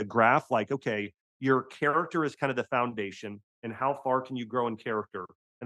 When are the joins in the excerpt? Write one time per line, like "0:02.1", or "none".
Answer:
none